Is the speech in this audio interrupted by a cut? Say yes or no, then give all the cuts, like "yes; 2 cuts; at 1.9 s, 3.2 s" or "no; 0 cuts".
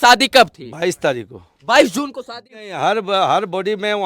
yes; 1 cut; at 2.5 s